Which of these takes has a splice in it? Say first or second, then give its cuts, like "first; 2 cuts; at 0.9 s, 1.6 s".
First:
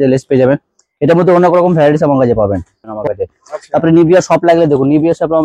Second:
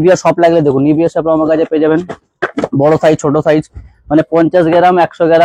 first; 1 cut; at 3.0 s